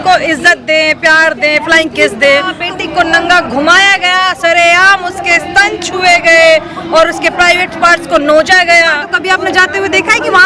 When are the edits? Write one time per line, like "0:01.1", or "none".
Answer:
0:02.6
0:09.1